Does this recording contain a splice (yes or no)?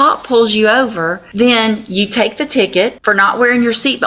yes